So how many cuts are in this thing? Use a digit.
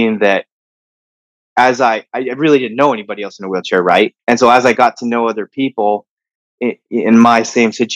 1